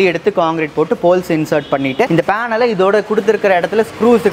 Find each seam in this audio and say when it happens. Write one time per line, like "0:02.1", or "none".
0:02.1